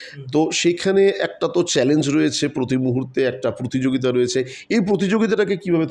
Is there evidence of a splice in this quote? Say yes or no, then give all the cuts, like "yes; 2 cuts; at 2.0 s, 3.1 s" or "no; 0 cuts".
no; 0 cuts